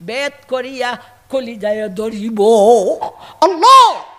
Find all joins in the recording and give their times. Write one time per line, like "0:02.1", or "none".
0:03.2